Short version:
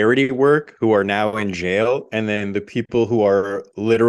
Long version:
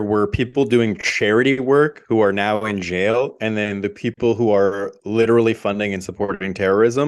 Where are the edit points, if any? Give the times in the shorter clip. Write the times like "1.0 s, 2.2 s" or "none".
none